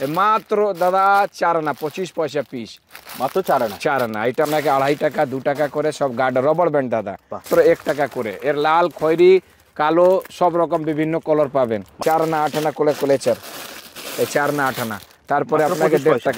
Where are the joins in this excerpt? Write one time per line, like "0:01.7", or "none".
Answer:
0:04.4
0:07.4
0:11.9